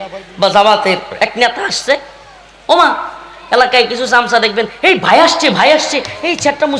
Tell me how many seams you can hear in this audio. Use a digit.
0